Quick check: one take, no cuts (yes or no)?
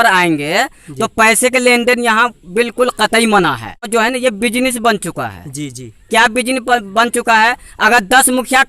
no